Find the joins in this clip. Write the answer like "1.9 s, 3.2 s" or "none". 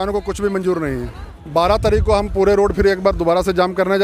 1.3 s

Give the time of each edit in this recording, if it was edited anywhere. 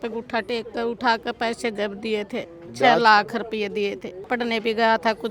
4.3 s

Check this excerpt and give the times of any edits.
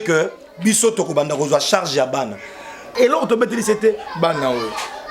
2.9 s

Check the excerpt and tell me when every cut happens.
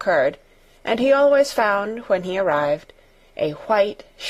2.6 s

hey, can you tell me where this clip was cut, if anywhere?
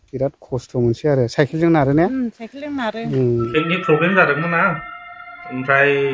3.5 s

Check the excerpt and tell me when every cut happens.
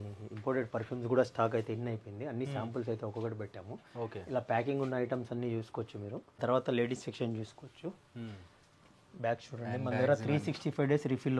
6.4 s

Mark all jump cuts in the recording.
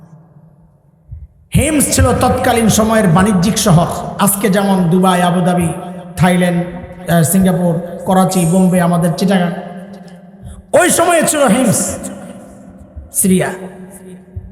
none

